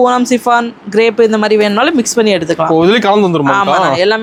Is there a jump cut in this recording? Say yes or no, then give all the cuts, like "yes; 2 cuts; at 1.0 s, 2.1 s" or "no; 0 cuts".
no; 0 cuts